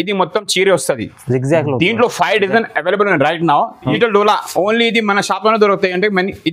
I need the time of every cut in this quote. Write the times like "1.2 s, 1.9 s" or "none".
3.9 s